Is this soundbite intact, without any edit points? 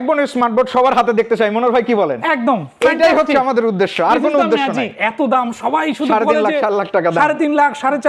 no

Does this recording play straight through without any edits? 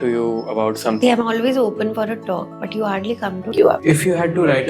no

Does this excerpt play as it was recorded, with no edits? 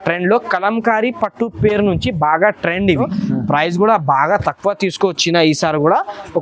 no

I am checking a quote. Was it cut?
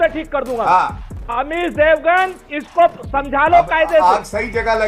yes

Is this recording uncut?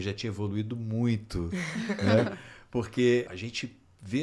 no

